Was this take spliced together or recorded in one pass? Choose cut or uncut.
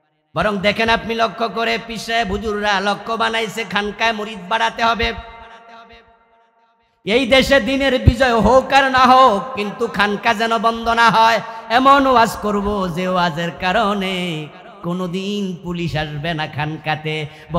uncut